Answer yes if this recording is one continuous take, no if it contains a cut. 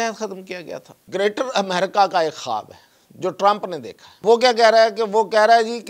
no